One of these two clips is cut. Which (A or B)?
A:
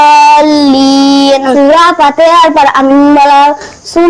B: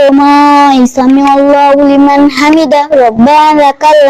A